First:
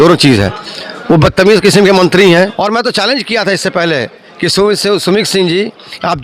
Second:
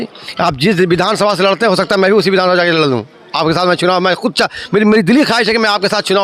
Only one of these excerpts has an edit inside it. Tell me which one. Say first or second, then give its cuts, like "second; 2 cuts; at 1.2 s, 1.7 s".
first; 1 cut; at 2.5 s